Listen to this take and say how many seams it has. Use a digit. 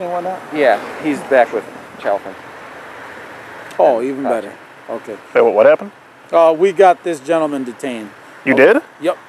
0